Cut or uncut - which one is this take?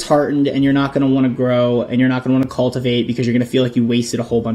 uncut